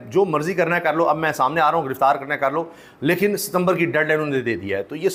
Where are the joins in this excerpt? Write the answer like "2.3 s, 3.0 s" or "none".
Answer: none